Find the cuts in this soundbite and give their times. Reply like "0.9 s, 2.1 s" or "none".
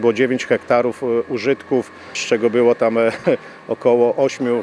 2.2 s